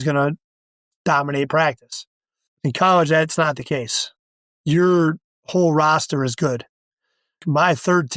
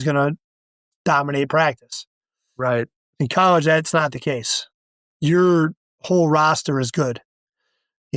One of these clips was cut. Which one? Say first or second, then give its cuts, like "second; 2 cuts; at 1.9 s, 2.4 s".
first; 2 cuts; at 2.4 s, 7.4 s